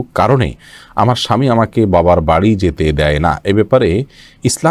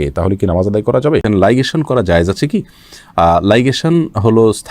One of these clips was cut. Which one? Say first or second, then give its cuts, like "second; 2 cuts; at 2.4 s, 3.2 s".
second; 1 cut; at 1.2 s